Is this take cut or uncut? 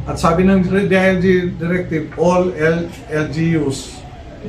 uncut